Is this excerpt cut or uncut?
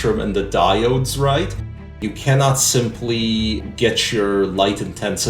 cut